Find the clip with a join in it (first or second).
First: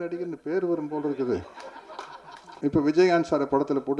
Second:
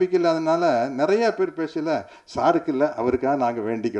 first